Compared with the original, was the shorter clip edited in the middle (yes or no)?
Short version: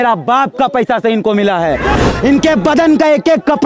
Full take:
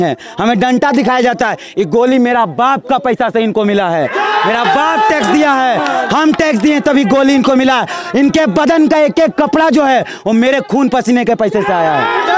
yes